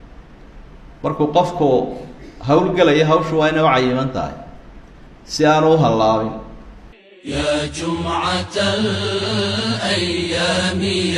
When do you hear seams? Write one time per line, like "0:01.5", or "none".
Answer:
0:07.1